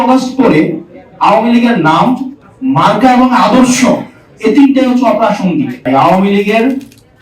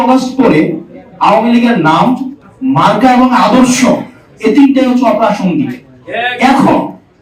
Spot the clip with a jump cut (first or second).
first